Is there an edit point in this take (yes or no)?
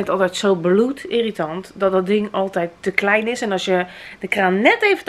no